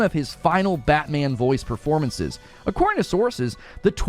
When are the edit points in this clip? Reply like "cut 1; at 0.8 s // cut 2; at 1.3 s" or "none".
cut 1; at 2.4 s